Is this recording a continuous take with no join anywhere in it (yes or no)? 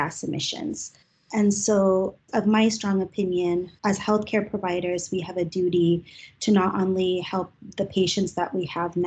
yes